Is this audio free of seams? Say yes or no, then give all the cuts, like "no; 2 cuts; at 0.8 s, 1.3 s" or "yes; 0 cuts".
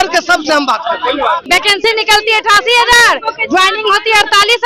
no; 1 cut; at 1.5 s